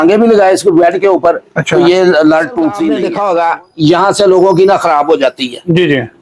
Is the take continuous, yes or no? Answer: no